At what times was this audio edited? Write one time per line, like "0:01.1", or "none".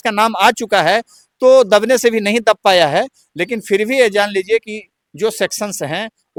none